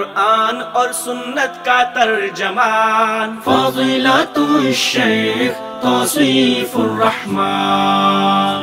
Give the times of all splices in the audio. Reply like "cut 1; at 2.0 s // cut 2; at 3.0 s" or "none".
none